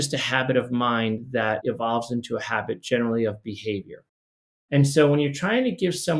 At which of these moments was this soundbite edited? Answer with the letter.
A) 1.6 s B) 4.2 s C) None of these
A